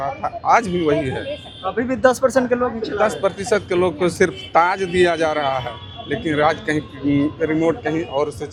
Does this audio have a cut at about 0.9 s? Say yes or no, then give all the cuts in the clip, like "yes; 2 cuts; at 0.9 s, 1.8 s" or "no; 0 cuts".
no; 0 cuts